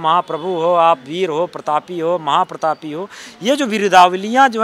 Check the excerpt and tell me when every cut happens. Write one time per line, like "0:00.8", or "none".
none